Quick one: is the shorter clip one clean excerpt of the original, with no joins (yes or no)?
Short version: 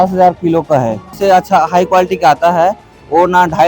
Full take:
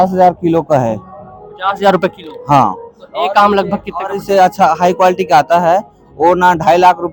no